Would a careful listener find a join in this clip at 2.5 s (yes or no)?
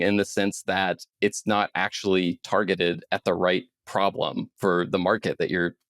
no